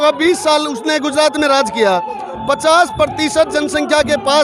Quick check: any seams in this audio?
no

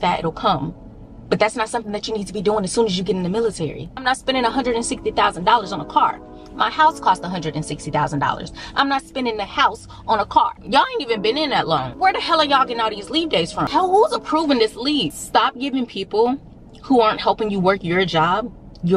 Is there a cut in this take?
yes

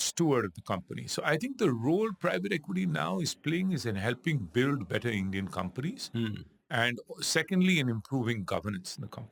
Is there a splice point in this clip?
no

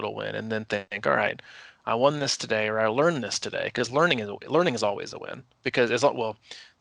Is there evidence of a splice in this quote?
no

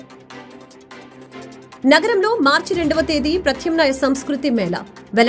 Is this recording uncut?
no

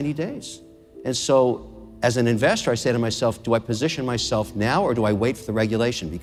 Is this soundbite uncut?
yes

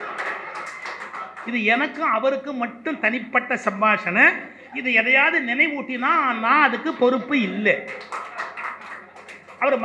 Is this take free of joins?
yes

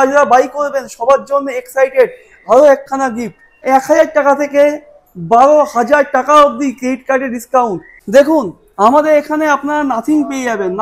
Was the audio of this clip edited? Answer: yes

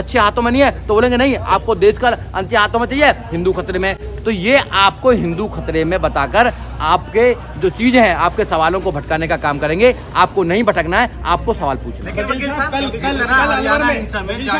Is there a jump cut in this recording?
no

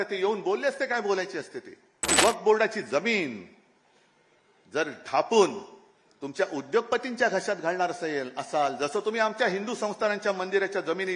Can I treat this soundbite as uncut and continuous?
no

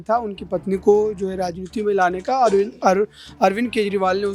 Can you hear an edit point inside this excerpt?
no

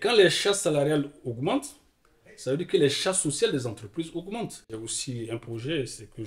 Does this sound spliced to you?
yes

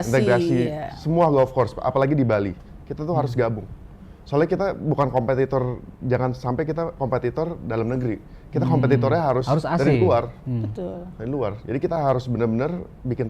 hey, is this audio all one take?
yes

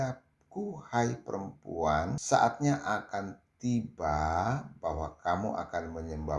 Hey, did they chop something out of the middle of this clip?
yes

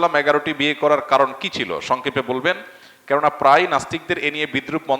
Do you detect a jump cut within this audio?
no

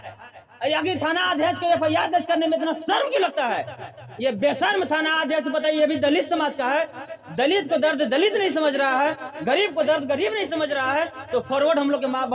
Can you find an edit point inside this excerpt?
no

